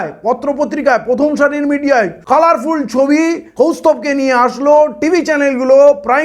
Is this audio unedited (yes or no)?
no